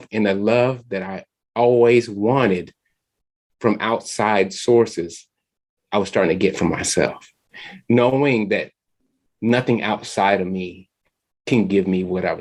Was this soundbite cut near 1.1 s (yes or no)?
no